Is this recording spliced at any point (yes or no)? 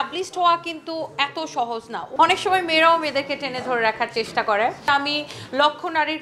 yes